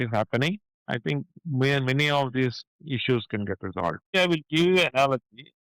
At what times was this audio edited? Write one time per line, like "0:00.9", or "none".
0:04.1